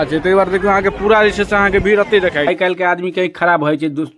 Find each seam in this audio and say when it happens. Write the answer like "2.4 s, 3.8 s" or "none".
2.5 s